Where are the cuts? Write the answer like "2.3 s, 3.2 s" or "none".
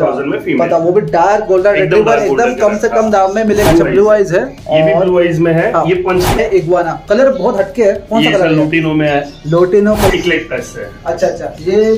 3.7 s, 6.4 s, 10.1 s